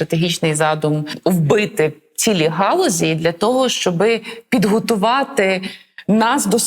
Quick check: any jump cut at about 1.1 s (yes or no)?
yes